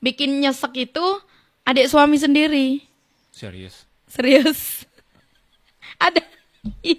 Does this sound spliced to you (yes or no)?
no